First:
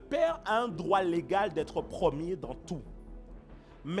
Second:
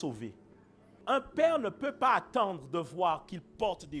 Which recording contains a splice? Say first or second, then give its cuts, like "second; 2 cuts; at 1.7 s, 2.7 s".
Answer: second; 1 cut; at 1.0 s